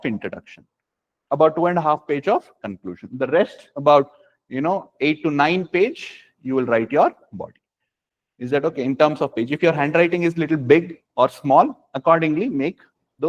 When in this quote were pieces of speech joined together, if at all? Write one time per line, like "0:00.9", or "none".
none